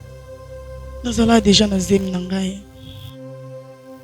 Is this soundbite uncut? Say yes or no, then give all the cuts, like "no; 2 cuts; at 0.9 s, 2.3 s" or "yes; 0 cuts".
no; 2 cuts; at 1.0 s, 2.8 s